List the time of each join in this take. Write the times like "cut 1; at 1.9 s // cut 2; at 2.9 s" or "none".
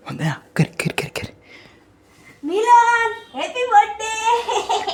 none